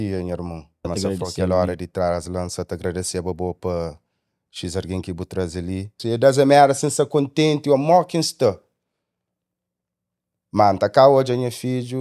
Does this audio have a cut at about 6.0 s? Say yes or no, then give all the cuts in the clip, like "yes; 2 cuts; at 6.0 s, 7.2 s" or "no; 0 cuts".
yes; 2 cuts; at 0.9 s, 6.0 s